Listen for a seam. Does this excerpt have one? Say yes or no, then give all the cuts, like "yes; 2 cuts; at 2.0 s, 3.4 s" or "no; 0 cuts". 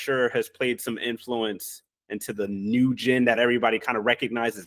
no; 0 cuts